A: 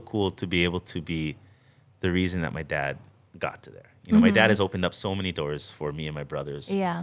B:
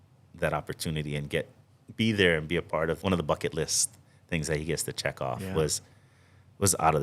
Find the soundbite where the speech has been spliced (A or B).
B